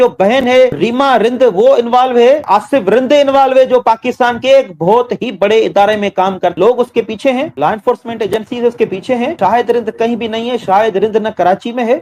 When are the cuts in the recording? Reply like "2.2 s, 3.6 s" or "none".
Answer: 0.8 s, 2.4 s, 6.5 s